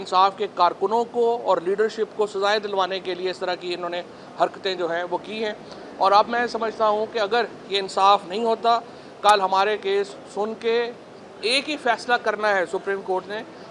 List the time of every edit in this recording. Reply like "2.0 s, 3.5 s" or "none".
none